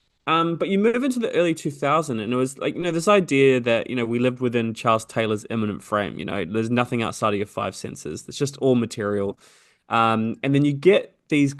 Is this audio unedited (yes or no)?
yes